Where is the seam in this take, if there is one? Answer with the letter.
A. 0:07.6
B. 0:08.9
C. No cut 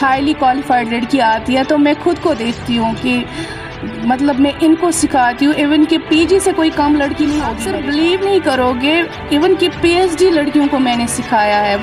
A